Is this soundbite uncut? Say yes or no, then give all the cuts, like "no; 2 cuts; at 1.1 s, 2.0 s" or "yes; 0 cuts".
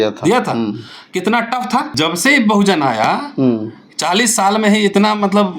no; 1 cut; at 1.9 s